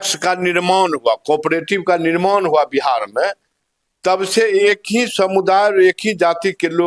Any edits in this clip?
no; 0 cuts

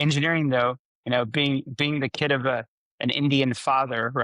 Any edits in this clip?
yes; 1 cut; at 0.9 s

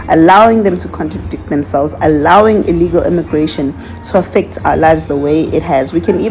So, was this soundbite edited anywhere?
no; 0 cuts

